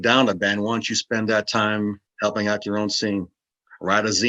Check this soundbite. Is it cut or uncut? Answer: cut